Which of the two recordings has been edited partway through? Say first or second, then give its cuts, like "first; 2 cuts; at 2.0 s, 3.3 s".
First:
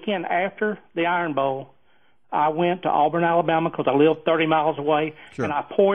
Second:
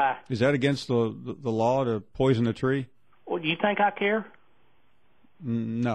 second; 1 cut; at 2.1 s